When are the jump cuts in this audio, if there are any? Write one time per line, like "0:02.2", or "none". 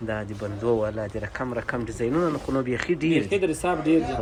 none